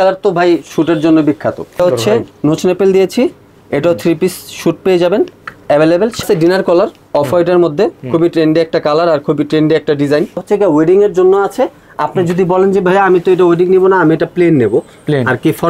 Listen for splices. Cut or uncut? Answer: cut